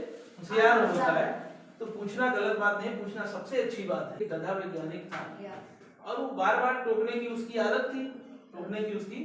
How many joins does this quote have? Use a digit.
1